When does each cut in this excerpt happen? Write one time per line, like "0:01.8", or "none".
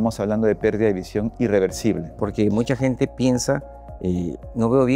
0:02.1

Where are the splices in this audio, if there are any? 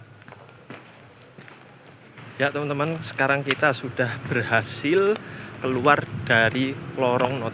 0:02.2

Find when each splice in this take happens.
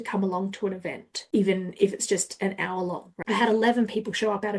0:01.1
0:03.1

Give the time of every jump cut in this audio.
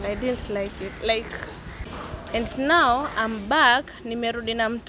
0:01.9

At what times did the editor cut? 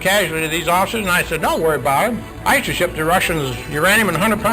0:02.3

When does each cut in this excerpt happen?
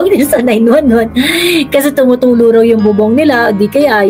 none

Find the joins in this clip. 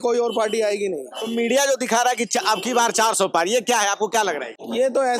none

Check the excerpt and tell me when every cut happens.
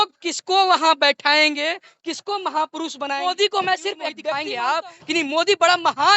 0:03.2
0:04.5

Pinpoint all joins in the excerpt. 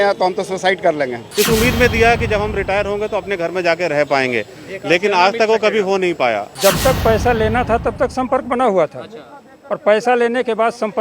0:01.2
0:06.5

